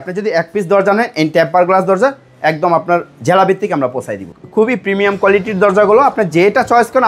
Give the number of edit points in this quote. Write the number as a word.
one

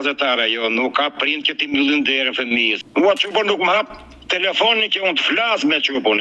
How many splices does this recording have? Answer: one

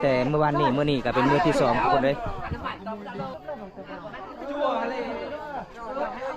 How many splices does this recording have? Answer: one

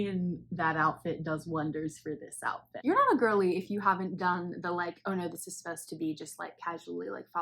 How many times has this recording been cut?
one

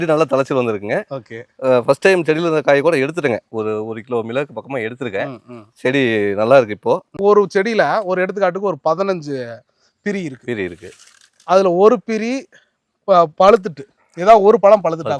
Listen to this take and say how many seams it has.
one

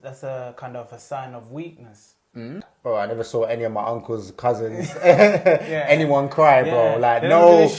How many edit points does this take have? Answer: one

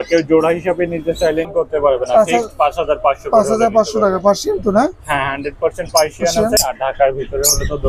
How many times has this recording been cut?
two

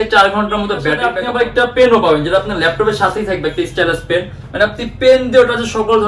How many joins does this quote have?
one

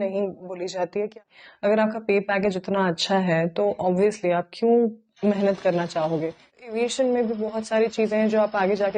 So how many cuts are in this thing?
two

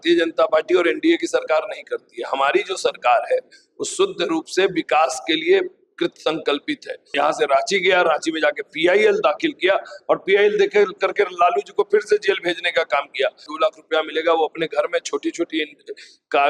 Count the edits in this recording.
two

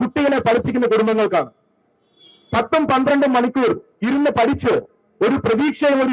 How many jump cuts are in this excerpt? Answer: zero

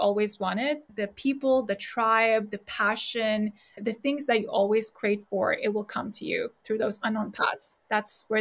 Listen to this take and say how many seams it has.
two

